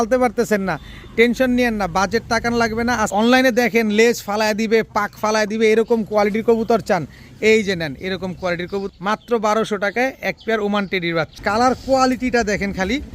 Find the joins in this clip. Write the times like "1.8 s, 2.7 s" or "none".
3.1 s, 8.9 s, 11.3 s